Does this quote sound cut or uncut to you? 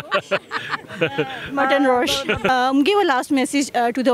cut